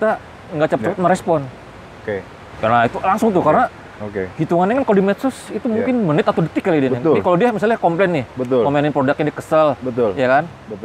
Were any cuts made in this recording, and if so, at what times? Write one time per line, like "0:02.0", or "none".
none